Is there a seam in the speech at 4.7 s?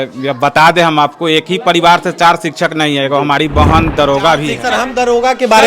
yes; 1 cut; at 4.7 s

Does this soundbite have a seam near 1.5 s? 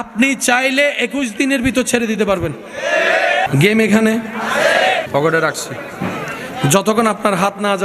no; 2 cuts; at 3.4 s, 5.1 s

